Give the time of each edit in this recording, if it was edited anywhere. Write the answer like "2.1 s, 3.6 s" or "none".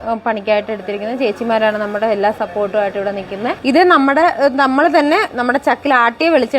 3.6 s